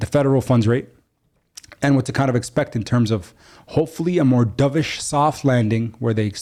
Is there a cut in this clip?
no; 0 cuts

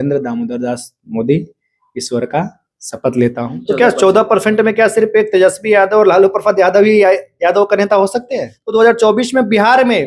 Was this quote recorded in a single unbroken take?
no; 2 cuts; at 3.6 s, 8.5 s

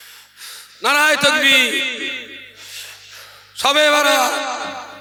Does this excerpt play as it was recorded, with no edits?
yes; 0 cuts

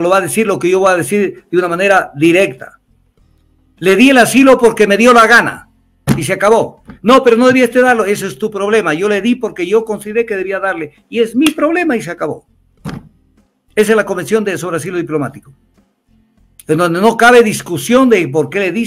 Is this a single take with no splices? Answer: yes; 0 cuts

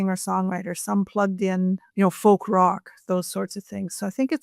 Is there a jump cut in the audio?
yes; 1 cut; at 1.9 s

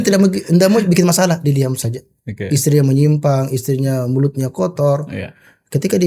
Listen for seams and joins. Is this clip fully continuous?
yes; 0 cuts

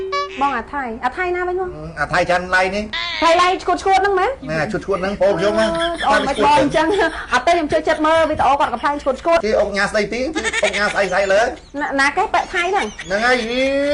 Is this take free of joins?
no; 3 cuts; at 3.0 s, 9.4 s, 11.7 s

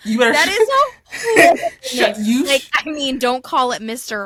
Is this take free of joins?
yes; 0 cuts

